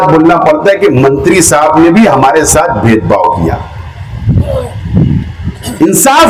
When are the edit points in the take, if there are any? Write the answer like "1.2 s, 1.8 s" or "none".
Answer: none